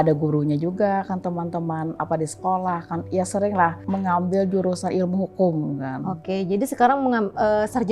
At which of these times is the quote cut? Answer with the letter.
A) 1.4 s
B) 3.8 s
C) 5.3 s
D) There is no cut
B